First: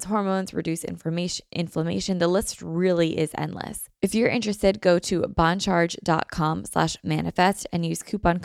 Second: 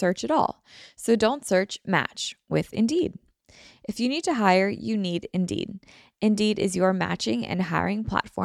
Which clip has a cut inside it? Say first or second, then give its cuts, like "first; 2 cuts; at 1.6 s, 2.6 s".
first; 1 cut; at 3.8 s